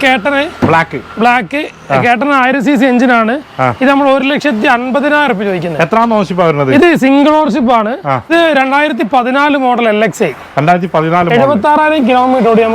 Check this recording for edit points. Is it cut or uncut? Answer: cut